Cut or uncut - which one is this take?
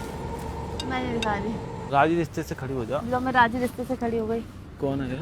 cut